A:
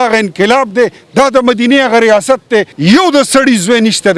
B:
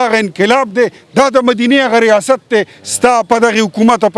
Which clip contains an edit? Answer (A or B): A